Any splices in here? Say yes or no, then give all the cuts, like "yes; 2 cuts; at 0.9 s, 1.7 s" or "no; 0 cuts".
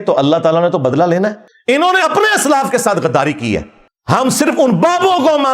yes; 1 cut; at 1.4 s